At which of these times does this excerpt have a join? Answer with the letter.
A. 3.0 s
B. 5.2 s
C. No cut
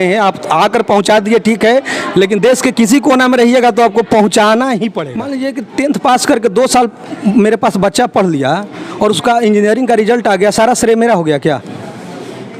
B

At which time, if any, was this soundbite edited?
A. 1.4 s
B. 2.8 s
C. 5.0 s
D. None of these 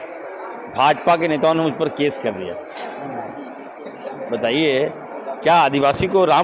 D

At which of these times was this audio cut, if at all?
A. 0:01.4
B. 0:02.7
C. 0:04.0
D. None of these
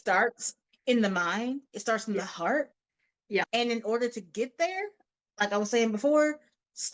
D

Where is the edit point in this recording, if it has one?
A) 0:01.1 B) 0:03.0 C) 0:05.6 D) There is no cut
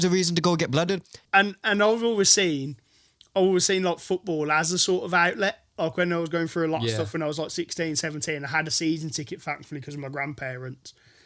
A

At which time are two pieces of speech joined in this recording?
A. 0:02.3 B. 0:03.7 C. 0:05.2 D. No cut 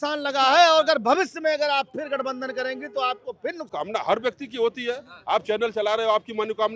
B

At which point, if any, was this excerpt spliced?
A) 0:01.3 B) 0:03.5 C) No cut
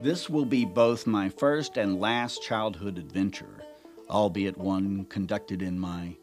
C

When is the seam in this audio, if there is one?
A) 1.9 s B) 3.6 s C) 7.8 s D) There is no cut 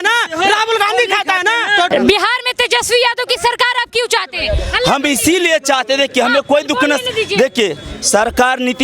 A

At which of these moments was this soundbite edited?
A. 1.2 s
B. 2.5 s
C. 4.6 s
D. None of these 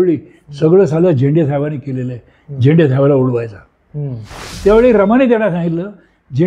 C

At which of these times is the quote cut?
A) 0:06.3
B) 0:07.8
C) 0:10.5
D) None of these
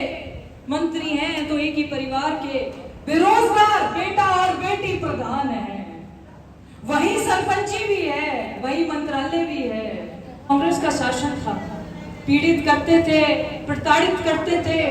C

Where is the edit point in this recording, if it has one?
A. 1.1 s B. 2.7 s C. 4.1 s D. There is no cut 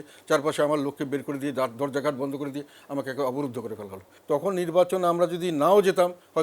C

